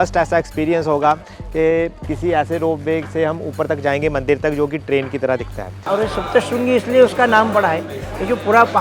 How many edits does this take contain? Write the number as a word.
one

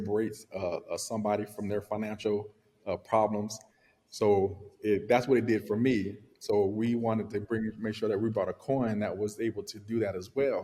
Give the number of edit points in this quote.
zero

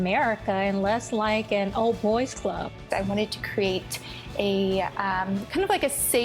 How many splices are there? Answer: one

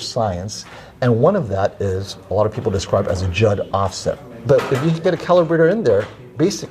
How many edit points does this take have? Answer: one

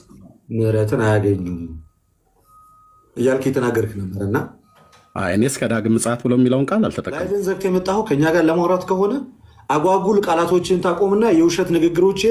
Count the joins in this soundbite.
one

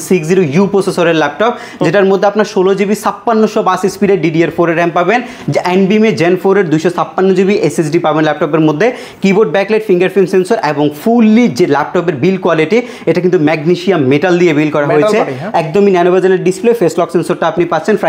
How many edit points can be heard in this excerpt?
zero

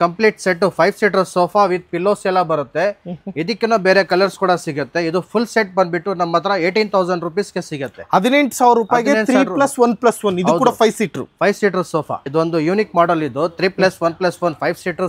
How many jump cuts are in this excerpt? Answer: zero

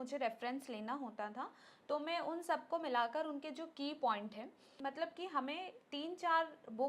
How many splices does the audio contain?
one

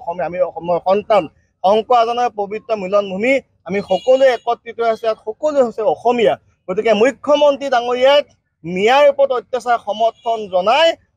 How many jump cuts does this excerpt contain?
zero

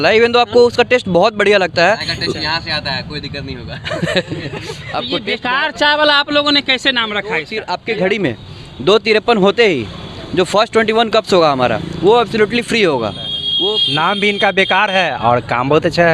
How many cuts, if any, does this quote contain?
three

